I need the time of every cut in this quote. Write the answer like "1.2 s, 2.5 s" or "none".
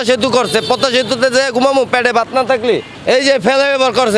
2.9 s